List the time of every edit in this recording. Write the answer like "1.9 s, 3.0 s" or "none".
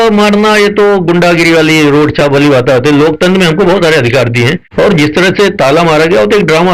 4.6 s

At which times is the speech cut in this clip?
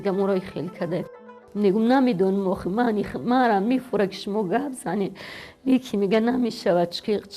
none

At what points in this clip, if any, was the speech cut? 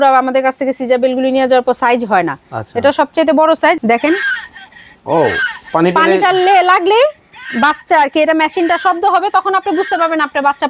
3.8 s

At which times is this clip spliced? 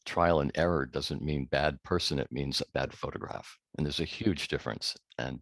none

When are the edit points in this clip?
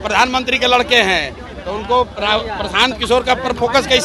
none

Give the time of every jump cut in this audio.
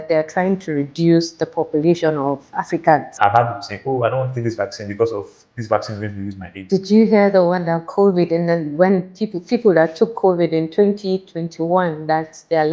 3.1 s, 6.5 s

